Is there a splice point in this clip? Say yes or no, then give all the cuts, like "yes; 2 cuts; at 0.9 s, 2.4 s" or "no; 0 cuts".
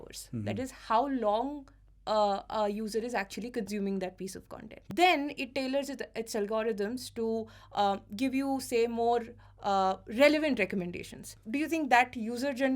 yes; 2 cuts; at 4.8 s, 11.4 s